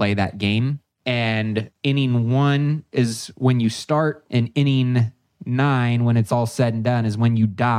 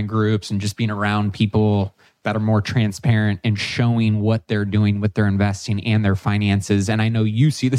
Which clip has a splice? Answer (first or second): first